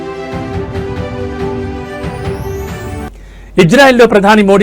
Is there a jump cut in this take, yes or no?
yes